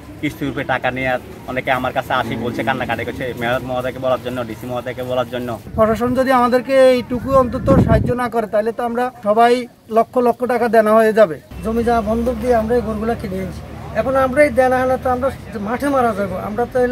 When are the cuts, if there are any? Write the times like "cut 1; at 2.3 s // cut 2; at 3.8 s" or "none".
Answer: cut 1; at 1.4 s // cut 2; at 5.7 s // cut 3; at 9.2 s // cut 4; at 9.8 s // cut 5; at 11.5 s